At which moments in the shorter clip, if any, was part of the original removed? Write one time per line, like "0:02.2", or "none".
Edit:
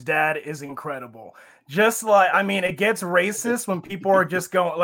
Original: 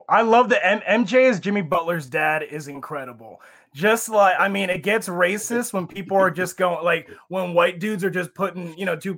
none